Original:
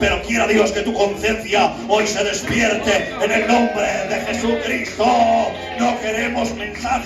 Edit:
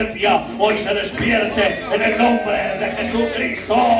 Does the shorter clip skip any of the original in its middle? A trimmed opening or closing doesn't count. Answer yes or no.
no